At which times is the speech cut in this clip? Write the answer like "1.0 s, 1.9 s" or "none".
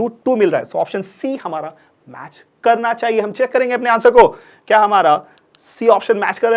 none